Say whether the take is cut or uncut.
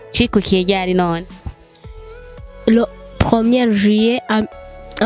uncut